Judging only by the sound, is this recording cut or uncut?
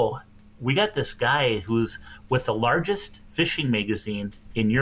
uncut